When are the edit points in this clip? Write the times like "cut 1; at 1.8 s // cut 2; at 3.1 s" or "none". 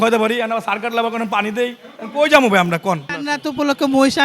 cut 1; at 3.2 s